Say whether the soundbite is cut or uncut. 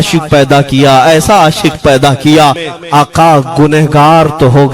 cut